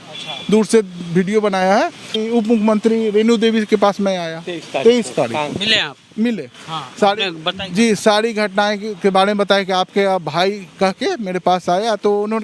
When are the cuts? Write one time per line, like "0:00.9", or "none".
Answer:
0:02.2